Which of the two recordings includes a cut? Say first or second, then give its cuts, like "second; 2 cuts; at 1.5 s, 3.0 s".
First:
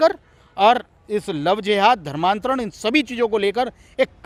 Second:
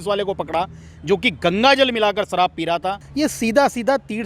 second; 1 cut; at 3.0 s